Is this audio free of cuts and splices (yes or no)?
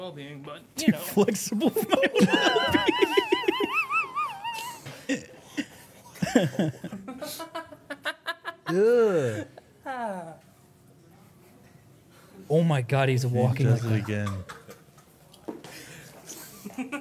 yes